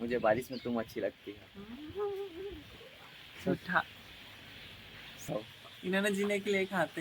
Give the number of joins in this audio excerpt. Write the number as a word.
one